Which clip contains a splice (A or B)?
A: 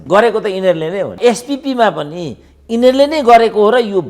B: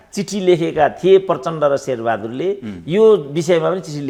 A